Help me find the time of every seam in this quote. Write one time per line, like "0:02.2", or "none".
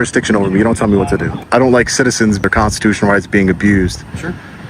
0:01.3
0:02.4